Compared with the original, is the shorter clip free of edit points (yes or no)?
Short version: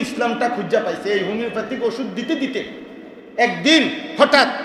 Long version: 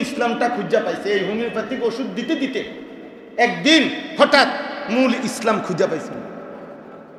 yes